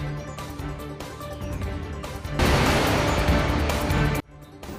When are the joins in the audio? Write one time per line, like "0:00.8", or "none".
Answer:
none